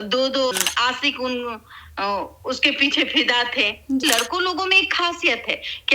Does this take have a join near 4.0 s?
yes; 1 cut; at 4.0 s

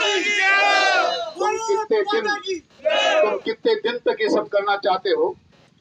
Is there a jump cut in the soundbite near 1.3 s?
no; 0 cuts

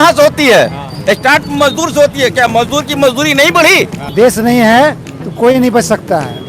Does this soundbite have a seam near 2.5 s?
no; 1 cut; at 4.0 s

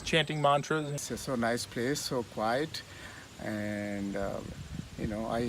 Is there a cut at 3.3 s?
no; 1 cut; at 1.0 s

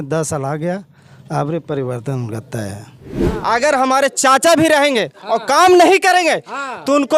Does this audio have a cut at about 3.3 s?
yes; 1 cut; at 3.3 s

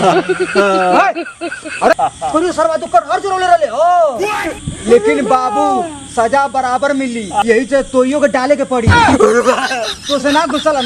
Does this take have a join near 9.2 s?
no; 2 cuts; at 1.9 s, 7.4 s

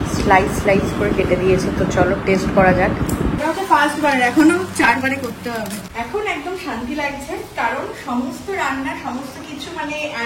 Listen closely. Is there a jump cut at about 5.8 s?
yes; 2 cuts; at 3.4 s, 5.8 s

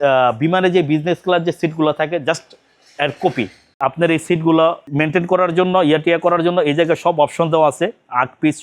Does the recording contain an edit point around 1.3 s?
no; 1 cut; at 3.8 s

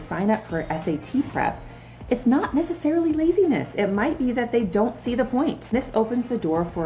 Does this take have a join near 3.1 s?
no; 1 cut; at 5.7 s

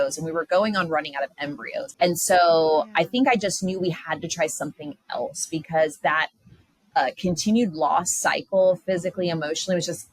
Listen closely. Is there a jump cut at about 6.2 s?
no; 1 cut; at 1.8 s

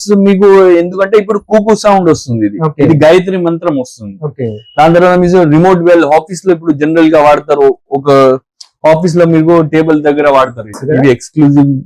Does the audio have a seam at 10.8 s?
yes; 1 cut; at 10.8 s

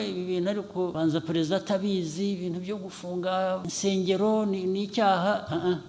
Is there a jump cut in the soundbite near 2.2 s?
no; 2 cuts; at 0.9 s, 3.7 s

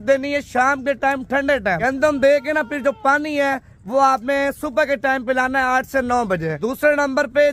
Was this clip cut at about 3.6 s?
no; 2 cuts; at 1.8 s, 6.6 s

